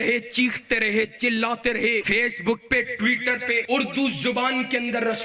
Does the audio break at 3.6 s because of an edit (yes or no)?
yes